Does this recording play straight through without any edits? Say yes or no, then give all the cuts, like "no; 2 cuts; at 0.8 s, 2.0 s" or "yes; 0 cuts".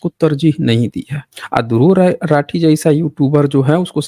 yes; 0 cuts